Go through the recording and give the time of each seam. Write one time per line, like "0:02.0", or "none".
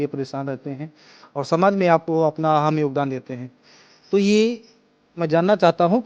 none